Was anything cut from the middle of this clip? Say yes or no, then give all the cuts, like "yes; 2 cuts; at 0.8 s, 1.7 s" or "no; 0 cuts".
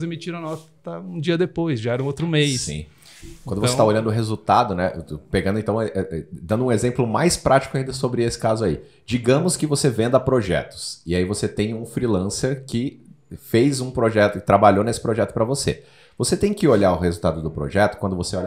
no; 0 cuts